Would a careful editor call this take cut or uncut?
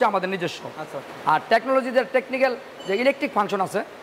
uncut